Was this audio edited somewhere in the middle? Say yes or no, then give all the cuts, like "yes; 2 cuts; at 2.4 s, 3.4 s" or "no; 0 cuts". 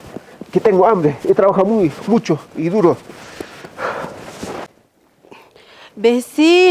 yes; 1 cut; at 4.8 s